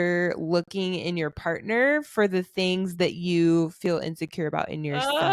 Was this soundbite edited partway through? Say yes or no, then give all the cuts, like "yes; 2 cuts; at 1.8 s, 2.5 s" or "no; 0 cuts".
no; 0 cuts